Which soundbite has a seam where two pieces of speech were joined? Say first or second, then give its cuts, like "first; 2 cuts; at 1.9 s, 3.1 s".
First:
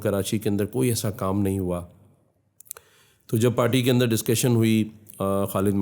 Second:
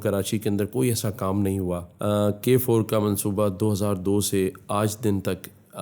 second; 1 cut; at 1.9 s